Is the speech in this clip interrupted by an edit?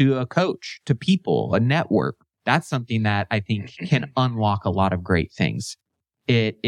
yes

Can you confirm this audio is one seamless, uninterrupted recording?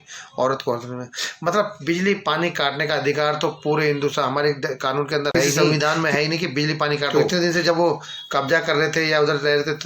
no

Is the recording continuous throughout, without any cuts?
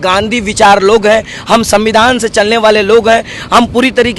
yes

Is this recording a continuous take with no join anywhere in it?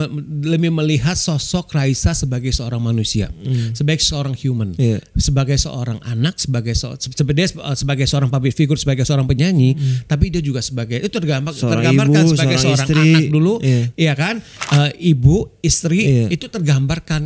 yes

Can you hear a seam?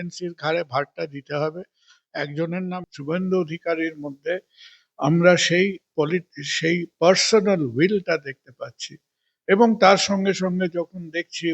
yes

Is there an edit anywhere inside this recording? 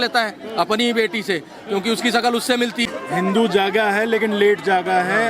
yes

